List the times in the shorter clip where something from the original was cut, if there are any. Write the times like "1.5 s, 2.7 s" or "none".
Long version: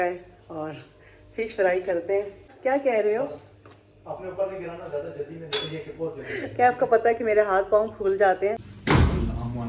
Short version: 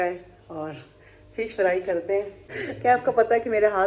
2.5 s